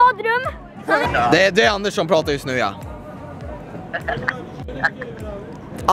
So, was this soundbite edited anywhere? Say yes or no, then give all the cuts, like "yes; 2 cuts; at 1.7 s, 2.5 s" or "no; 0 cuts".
yes; 1 cut; at 1.0 s